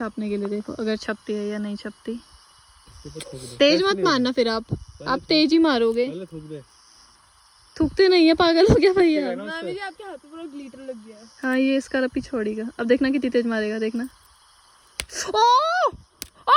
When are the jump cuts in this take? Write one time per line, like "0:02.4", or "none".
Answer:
none